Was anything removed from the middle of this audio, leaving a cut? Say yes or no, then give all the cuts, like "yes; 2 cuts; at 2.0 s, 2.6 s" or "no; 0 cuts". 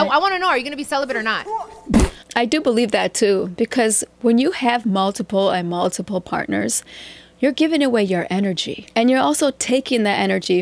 no; 0 cuts